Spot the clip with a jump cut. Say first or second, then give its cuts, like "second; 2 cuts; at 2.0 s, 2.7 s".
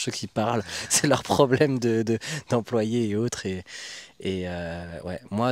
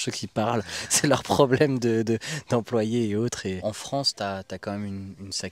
second; 1 cut; at 3.6 s